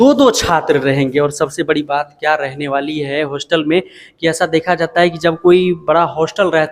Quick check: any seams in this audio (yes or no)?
no